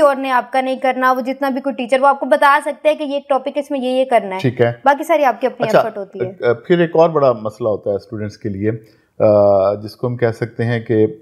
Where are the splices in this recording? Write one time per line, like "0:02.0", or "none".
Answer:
none